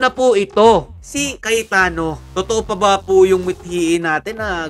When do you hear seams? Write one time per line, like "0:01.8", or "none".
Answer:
0:01.4
0:02.2